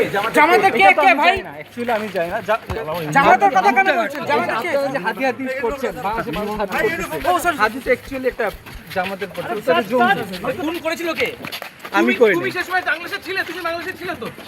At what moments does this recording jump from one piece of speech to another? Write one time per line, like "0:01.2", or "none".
none